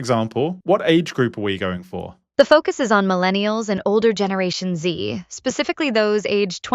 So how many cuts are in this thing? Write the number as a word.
one